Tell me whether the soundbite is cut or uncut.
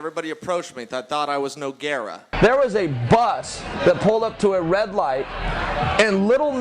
cut